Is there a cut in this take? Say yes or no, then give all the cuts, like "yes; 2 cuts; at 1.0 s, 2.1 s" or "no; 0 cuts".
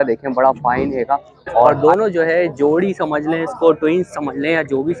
yes; 1 cut; at 1.7 s